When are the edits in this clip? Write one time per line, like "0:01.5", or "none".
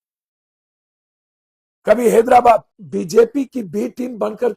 0:02.8